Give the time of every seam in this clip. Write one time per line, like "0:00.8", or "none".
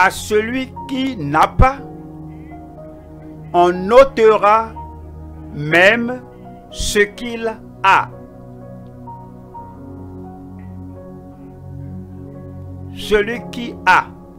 none